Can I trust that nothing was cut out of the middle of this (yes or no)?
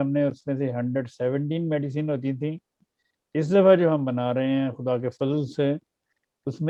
yes